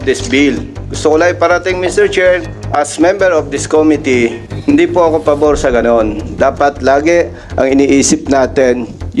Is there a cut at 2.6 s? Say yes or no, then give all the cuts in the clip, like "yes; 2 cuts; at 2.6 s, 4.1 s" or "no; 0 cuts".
yes; 2 cuts; at 2.6 s, 4.5 s